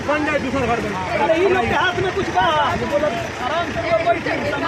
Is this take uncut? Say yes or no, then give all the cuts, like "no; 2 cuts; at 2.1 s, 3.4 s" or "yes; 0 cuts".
yes; 0 cuts